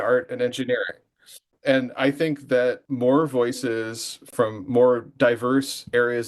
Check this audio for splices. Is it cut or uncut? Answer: cut